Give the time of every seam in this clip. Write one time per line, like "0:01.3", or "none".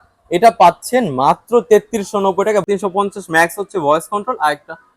0:02.6